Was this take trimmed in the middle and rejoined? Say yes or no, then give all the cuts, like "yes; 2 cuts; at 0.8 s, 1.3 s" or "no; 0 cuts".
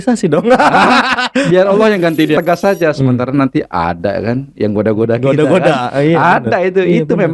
yes; 1 cut; at 2.4 s